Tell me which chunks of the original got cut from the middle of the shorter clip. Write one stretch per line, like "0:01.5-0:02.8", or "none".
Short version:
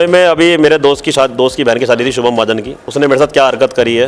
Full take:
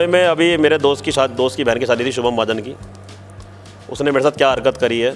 0:02.8-0:03.8